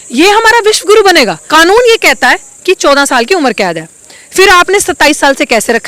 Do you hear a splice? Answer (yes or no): yes